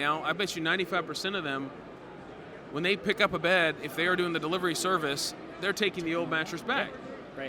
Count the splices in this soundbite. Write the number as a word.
zero